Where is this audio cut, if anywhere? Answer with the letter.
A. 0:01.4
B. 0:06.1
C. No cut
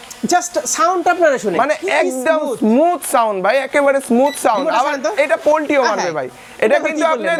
C